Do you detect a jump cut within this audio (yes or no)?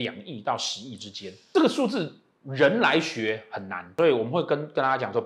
no